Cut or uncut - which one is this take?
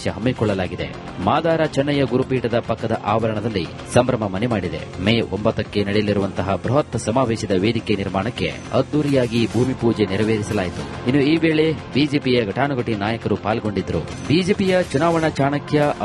uncut